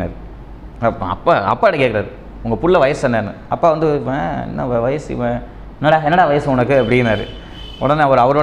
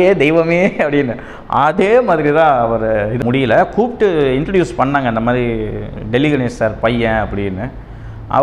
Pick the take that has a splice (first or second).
second